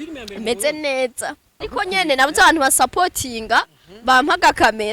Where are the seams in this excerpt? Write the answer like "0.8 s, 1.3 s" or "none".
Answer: 1.5 s